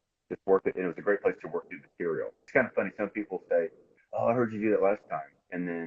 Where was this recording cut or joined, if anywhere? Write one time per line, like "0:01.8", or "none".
0:02.5